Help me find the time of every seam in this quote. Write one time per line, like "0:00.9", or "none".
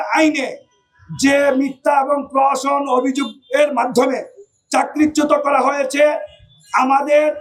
none